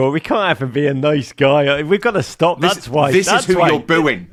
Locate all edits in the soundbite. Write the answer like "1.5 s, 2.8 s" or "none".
none